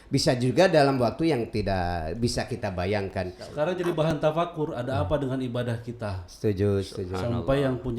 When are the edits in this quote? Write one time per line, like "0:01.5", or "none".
0:03.7